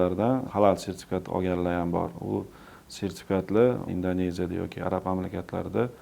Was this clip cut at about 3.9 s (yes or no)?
yes